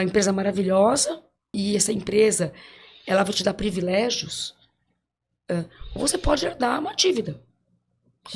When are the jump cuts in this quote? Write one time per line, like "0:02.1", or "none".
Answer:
0:01.6